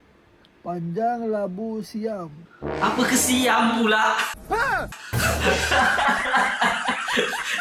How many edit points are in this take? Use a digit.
0